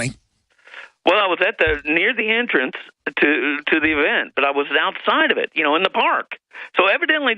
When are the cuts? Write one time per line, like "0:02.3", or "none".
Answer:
0:03.3

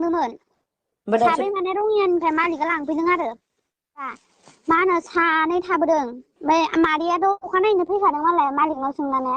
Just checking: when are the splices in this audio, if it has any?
0:04.1

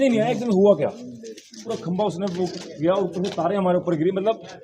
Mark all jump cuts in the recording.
0:01.7

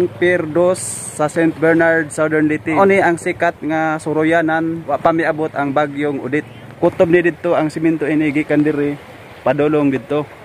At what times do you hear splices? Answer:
0:02.8
0:04.9
0:06.6

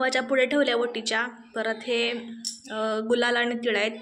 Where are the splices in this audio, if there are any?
none

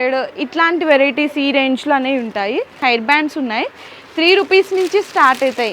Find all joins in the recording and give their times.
0:02.7

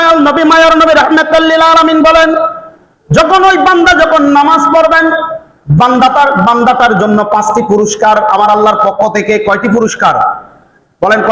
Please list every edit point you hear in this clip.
none

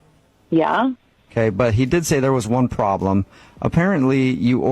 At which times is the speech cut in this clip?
0:01.2

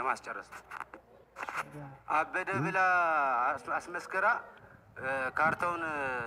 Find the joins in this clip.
none

